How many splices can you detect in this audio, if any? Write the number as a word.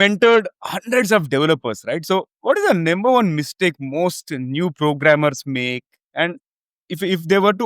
one